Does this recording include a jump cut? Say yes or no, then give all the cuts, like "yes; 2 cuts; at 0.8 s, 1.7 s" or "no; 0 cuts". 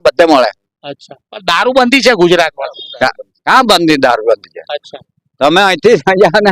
no; 0 cuts